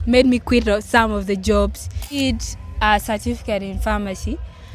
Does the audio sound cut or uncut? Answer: cut